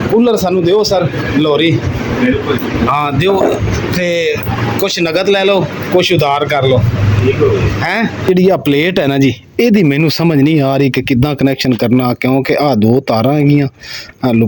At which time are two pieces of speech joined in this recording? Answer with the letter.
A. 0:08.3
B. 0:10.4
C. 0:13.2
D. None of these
A